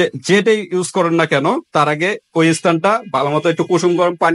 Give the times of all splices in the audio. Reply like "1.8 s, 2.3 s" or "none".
none